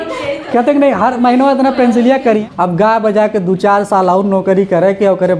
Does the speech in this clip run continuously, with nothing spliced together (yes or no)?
no